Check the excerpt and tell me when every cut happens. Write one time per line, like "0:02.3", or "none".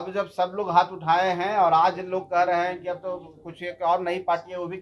none

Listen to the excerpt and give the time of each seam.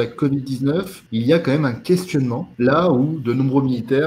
0:01.0
0:02.4

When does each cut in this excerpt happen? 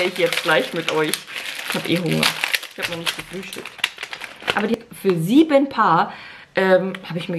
0:04.8

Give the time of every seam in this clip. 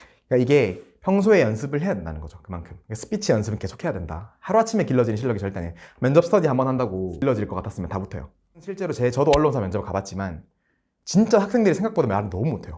0:07.2
0:08.8

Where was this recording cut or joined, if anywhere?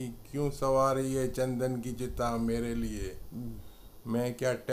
none

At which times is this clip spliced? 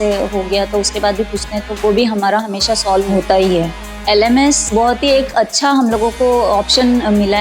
0:01.7
0:03.1
0:04.6

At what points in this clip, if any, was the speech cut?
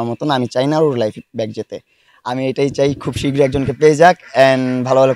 0:02.1

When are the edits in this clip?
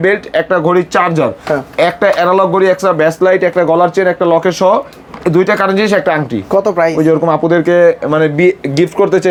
none

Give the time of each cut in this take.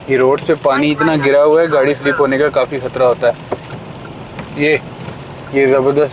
0:03.7

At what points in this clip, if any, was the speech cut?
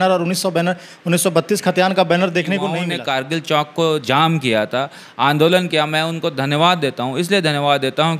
0:02.9

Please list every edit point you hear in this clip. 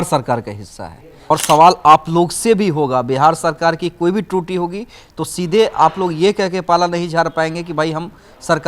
0:01.3

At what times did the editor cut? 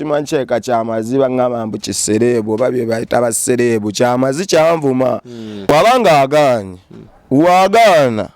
0:05.7

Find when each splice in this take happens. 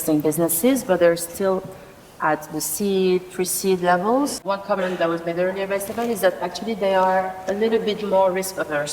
0:04.4

